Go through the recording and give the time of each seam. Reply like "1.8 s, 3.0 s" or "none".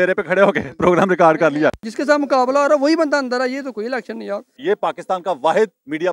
1.9 s, 4.6 s

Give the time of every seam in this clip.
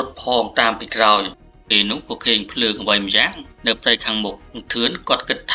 1.6 s

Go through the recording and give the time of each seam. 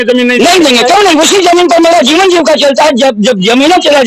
none

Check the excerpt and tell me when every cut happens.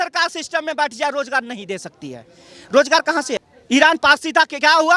3.4 s

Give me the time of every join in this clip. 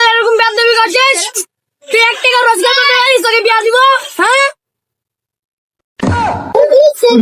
none

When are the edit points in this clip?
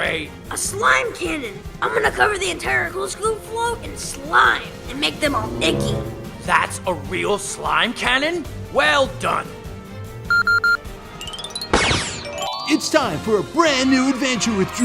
12.5 s

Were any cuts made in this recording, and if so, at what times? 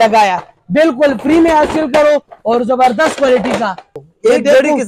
3.9 s

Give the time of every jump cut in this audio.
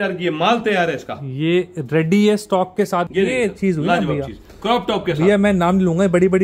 3.1 s

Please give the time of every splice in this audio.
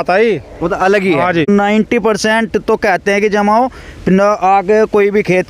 1.5 s

